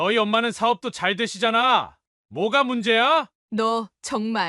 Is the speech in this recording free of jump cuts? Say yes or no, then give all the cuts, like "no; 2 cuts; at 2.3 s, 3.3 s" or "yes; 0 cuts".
no; 1 cut; at 3.3 s